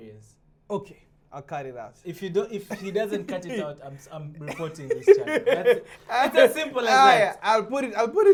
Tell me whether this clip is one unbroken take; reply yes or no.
yes